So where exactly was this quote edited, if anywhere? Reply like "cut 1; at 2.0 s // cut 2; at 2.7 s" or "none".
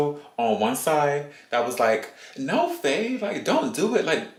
none